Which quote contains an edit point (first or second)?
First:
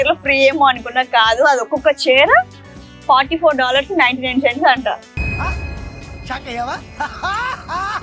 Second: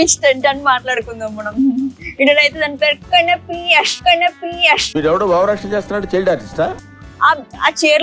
second